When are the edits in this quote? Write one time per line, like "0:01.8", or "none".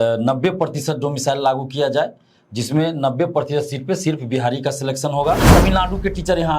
0:05.4